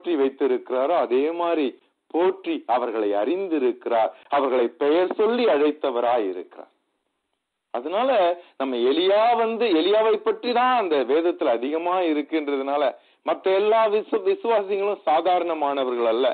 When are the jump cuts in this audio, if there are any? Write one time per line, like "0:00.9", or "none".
none